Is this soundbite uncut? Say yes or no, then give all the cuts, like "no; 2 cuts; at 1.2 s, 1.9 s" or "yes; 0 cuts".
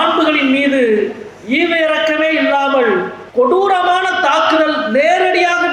no; 1 cut; at 3.2 s